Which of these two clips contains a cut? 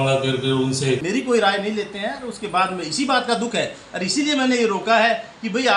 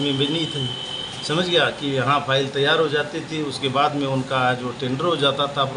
first; 1 cut; at 1.0 s

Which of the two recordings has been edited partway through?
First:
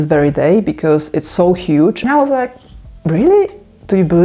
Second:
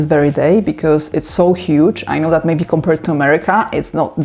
first; 1 cut; at 2.0 s

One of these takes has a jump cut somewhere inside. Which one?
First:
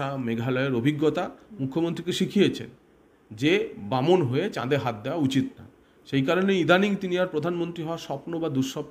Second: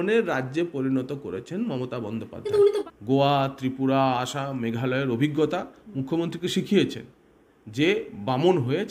second; 1 cut; at 2.9 s

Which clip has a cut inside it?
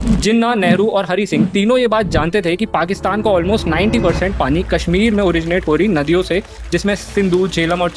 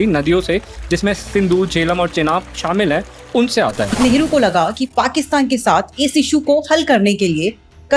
second; 1 cut; at 3.9 s

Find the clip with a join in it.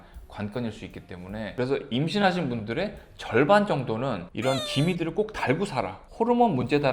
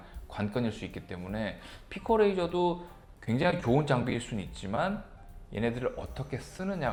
first; 1 cut; at 1.5 s

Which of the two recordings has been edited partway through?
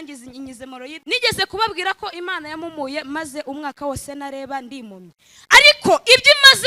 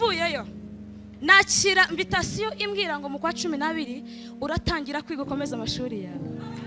first; 1 cut; at 1.0 s

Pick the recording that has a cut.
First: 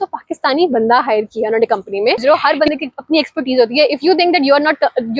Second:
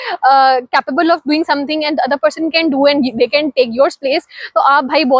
first; 1 cut; at 2.2 s

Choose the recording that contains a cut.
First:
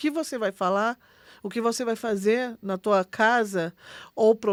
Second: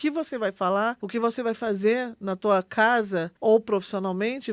second; 2 cuts; at 1.0 s, 3.3 s

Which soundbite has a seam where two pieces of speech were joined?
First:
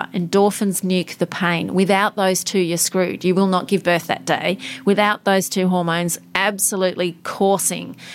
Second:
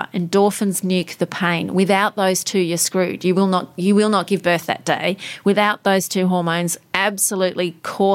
first; 1 cut; at 3.7 s

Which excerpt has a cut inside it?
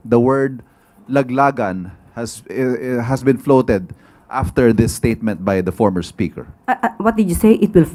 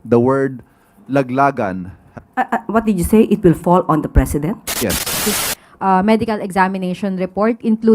second; 2 cuts; at 2.2 s, 5.2 s

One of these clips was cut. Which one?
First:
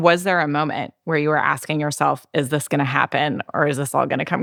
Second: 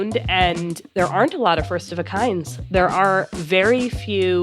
second; 1 cut; at 3.4 s

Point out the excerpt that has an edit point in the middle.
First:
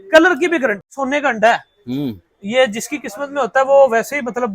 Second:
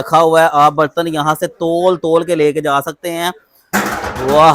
first; 1 cut; at 0.9 s

